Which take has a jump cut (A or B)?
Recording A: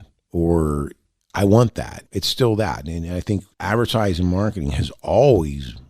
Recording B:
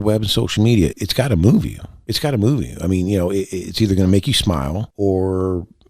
B